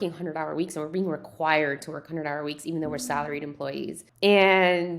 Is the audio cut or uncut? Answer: cut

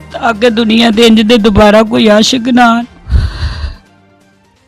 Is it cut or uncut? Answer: uncut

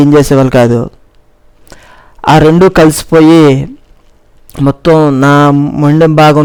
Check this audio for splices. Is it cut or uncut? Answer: uncut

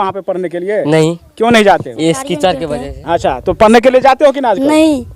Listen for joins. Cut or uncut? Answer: cut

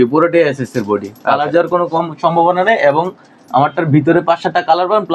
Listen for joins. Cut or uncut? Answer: uncut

